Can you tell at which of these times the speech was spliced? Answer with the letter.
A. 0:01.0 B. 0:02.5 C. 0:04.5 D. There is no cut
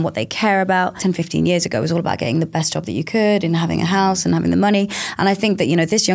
A